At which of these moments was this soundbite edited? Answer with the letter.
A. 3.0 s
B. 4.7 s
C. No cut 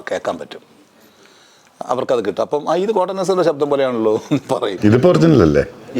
B